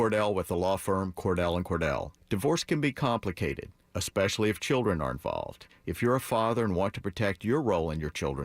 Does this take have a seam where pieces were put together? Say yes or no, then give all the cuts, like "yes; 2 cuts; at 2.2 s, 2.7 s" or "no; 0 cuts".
no; 0 cuts